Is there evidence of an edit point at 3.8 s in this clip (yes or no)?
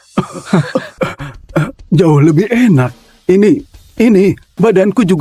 yes